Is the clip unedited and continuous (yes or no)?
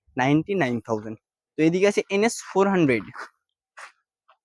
yes